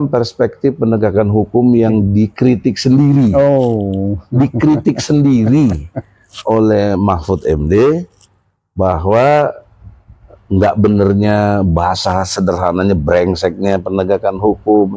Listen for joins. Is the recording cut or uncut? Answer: uncut